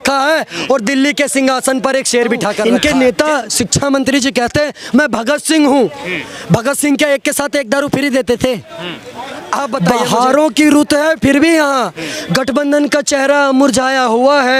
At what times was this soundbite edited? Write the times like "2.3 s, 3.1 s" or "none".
2.6 s, 9.8 s